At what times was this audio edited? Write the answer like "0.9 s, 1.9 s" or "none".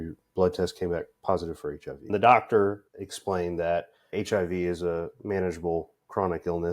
2.0 s, 2.8 s